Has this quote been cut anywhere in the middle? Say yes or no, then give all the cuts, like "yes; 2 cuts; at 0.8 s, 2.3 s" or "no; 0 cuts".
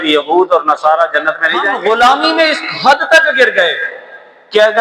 yes; 1 cut; at 1.7 s